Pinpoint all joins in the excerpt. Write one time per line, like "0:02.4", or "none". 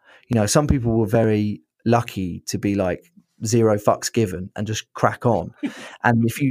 none